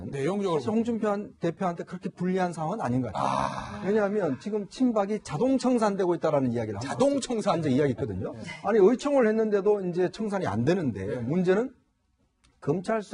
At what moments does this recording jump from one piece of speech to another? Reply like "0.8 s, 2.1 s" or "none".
1.4 s